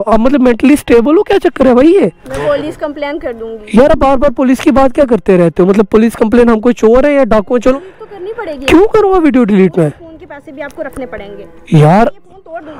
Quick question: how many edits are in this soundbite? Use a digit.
2